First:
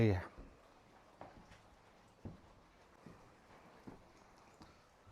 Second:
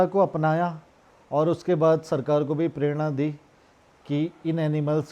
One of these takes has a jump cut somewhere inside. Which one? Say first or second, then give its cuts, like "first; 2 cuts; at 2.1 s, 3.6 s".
first; 1 cut; at 2.9 s